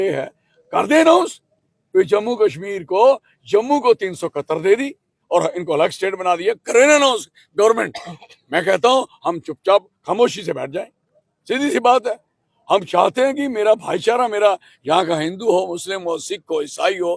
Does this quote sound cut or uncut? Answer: uncut